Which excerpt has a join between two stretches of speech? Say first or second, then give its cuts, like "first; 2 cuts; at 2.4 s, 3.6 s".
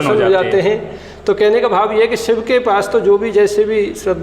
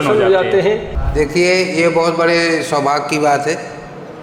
second; 1 cut; at 1.0 s